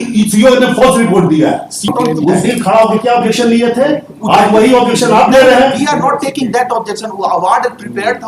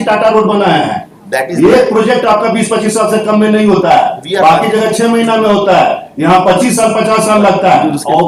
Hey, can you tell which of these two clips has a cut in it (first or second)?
first